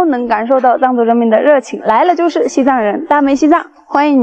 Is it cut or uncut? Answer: uncut